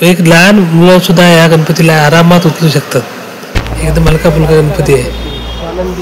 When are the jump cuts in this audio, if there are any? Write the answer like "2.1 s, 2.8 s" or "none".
5.0 s